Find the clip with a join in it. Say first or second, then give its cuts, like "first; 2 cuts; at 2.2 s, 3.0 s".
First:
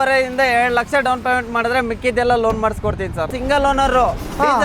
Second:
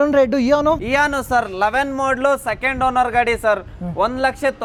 first; 1 cut; at 3.3 s